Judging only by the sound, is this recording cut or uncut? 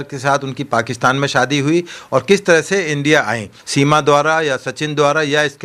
cut